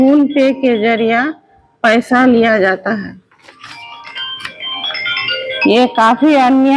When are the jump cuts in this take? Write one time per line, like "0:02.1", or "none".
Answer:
none